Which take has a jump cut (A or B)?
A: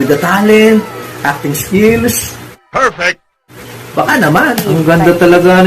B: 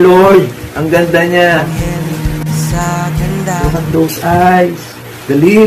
A